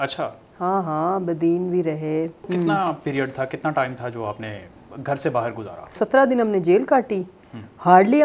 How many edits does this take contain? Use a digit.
2